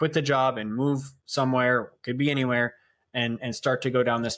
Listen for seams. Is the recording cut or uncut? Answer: uncut